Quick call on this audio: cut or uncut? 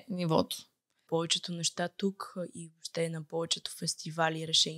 cut